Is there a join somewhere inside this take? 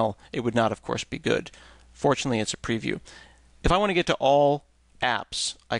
no; 0 cuts

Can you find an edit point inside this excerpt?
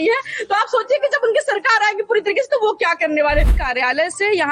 yes; 1 cut; at 3.6 s

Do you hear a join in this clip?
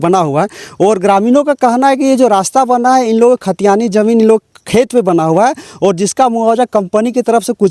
no; 0 cuts

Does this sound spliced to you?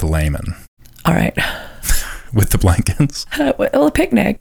no; 0 cuts

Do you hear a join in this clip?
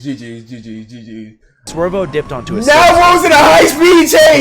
yes; 1 cut; at 1.6 s

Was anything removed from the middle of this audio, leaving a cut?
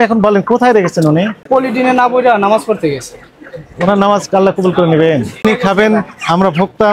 yes; 2 cuts; at 1.4 s, 5.4 s

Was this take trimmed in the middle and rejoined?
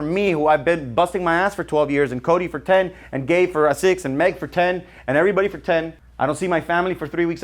yes; 1 cut; at 6.0 s

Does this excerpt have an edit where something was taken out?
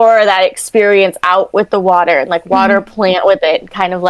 no; 0 cuts

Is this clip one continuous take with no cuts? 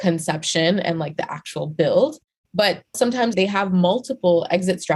no; 1 cut; at 3.1 s

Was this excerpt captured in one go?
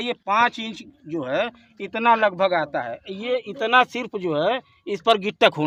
yes; 0 cuts

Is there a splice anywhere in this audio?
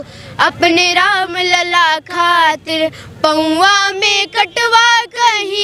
no; 0 cuts

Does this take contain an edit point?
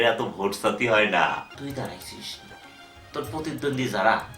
yes; 1 cut; at 1.4 s

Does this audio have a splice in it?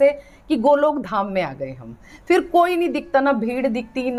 no; 0 cuts

